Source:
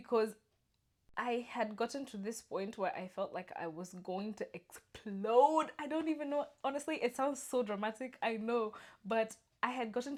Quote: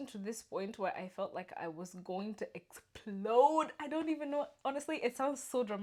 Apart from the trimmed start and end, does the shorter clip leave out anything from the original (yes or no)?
no